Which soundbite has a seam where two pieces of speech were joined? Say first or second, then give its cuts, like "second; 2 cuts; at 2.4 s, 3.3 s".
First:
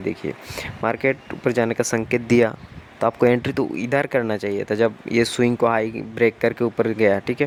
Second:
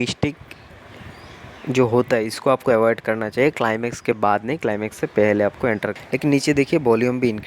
second; 1 cut; at 5.9 s